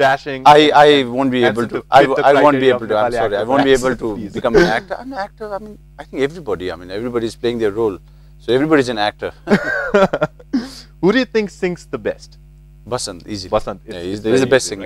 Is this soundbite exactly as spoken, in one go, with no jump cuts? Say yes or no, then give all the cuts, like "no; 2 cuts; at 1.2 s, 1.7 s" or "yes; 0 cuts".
no; 1 cut; at 12.6 s